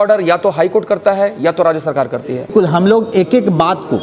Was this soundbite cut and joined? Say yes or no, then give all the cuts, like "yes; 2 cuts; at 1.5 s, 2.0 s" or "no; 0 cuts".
yes; 1 cut; at 2.5 s